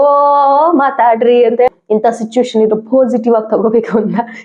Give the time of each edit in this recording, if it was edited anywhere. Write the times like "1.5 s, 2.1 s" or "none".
1.7 s